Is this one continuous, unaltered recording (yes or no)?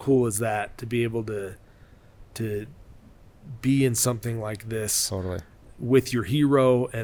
yes